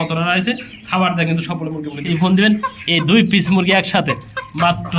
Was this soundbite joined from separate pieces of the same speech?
yes; 1 cut; at 2.0 s

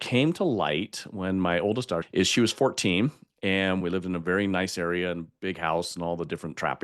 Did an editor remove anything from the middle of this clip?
yes; 2 cuts; at 2.1 s, 3.8 s

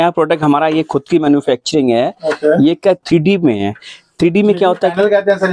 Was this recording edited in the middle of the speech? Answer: no; 0 cuts

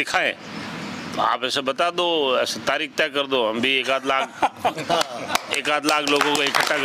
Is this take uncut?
yes; 0 cuts

